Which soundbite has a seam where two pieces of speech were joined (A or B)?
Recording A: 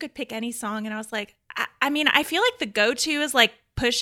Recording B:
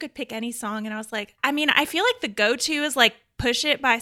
B